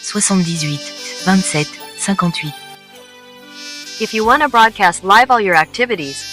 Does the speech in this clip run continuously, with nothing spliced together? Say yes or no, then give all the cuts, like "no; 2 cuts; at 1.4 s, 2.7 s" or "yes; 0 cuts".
no; 1 cut; at 2.3 s